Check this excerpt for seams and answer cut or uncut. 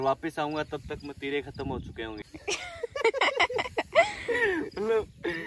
cut